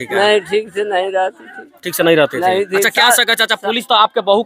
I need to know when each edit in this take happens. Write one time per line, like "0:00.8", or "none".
none